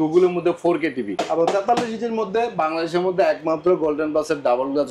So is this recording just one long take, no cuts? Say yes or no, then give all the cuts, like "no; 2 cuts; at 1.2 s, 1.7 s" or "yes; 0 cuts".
no; 1 cut; at 1.1 s